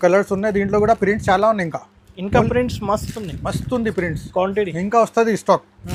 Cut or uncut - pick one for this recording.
uncut